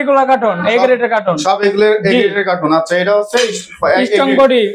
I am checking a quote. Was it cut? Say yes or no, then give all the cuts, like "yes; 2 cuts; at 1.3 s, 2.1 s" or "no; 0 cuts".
no; 0 cuts